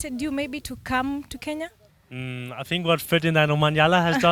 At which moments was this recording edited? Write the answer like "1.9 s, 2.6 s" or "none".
none